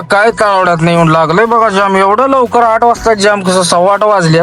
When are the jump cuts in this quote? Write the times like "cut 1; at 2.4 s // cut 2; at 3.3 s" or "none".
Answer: none